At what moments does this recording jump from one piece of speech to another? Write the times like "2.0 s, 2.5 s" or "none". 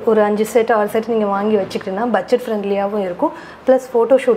none

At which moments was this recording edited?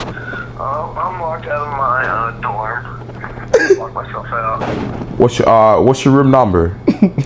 none

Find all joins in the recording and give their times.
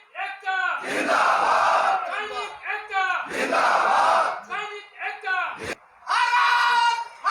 5.7 s

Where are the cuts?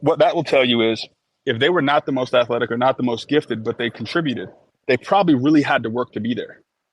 none

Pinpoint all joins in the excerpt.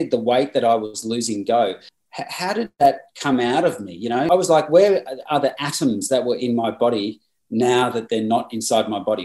4.2 s

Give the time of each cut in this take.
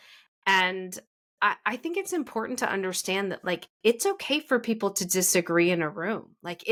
none

